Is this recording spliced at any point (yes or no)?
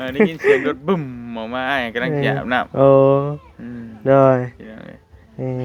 no